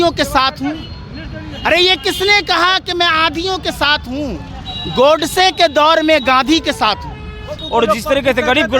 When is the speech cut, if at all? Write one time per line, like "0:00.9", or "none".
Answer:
0:07.6